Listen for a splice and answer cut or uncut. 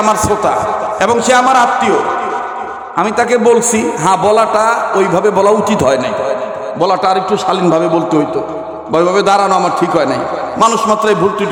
uncut